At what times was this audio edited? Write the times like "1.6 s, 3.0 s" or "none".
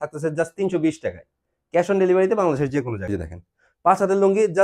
3.1 s